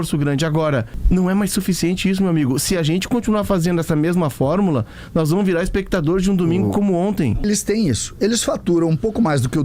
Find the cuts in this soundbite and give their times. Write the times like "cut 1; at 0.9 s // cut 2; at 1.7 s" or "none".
cut 1; at 0.9 s // cut 2; at 7.4 s